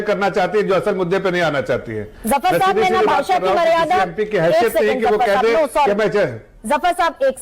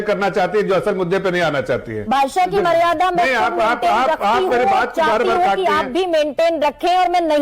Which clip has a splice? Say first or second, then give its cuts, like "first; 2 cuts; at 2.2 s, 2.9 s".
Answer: second; 1 cut; at 1.9 s